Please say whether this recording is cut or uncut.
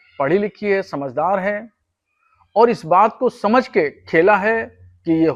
uncut